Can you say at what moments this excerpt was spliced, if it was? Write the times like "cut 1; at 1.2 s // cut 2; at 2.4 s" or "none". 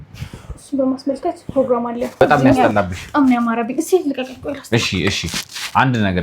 cut 1; at 2.2 s